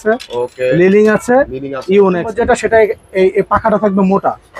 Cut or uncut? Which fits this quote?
cut